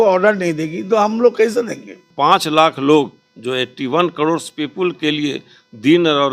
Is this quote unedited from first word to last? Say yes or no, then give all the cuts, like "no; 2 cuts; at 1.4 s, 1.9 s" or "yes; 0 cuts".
no; 1 cut; at 2.0 s